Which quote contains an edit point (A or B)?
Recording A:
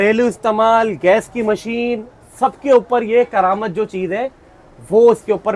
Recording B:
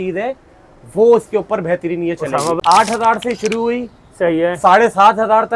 B